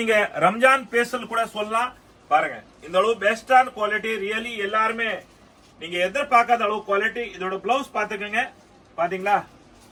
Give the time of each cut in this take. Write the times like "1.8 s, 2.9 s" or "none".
none